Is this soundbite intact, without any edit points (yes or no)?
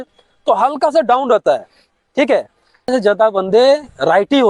no